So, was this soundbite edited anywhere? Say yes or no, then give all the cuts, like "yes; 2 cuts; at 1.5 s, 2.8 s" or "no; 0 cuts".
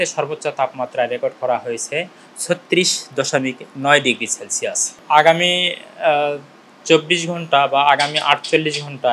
yes; 1 cut; at 4.9 s